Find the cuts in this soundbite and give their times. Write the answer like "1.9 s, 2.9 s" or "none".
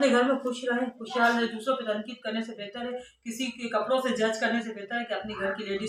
none